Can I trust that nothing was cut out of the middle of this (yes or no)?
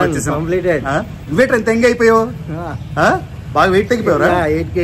yes